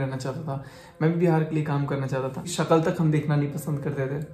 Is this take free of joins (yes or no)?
no